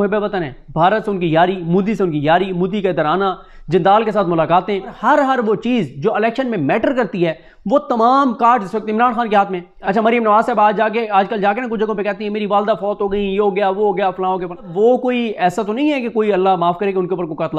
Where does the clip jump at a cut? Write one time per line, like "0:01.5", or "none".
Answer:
0:05.0
0:09.7
0:14.7